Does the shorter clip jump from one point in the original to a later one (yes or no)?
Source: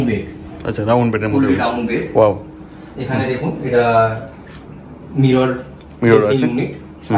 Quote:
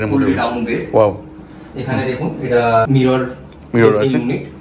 yes